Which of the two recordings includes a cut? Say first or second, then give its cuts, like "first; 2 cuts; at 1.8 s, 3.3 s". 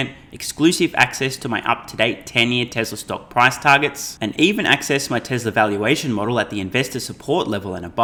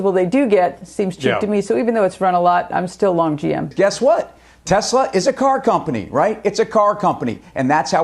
second; 1 cut; at 3.7 s